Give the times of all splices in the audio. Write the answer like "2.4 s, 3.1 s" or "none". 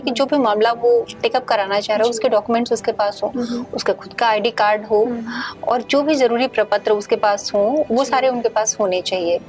none